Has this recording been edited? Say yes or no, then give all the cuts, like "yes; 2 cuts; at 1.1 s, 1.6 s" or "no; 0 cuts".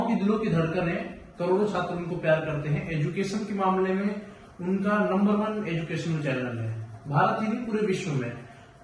no; 0 cuts